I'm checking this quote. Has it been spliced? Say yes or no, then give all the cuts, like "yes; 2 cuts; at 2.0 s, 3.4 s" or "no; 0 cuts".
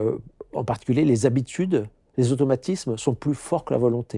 no; 0 cuts